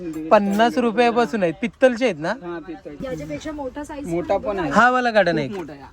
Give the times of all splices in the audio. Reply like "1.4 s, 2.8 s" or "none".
3.1 s